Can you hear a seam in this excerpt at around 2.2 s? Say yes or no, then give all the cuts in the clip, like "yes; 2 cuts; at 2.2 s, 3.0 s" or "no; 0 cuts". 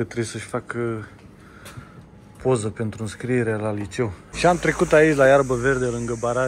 no; 1 cut; at 4.2 s